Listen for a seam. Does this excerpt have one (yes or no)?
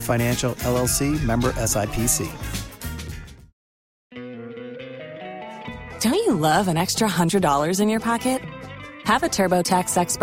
yes